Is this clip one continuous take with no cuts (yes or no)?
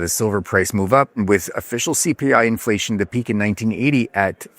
no